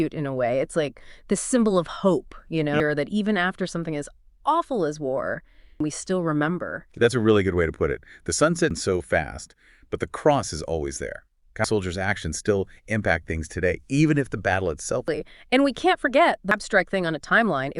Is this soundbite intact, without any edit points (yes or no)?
no